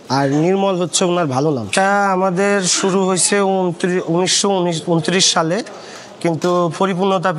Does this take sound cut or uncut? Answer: cut